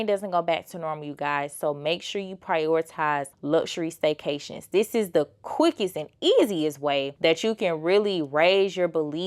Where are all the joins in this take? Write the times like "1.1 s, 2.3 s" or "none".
3.3 s, 7.1 s